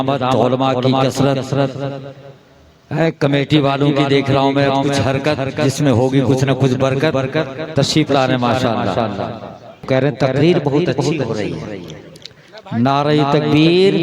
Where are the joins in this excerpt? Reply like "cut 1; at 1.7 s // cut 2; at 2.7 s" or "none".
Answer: cut 1; at 9.9 s